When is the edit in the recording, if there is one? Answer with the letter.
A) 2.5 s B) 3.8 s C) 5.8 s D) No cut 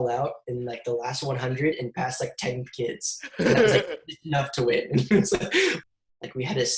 C